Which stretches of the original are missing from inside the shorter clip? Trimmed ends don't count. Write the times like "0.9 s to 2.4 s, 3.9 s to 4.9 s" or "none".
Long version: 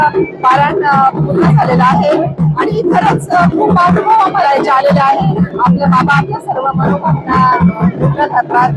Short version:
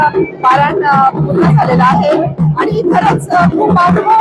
none